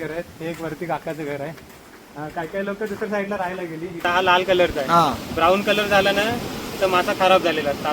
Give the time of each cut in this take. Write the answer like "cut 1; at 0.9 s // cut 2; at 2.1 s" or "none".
cut 1; at 4.0 s